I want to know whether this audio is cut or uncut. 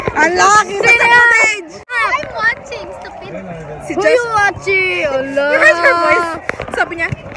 cut